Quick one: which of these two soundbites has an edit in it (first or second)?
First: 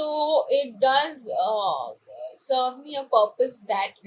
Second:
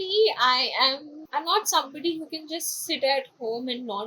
second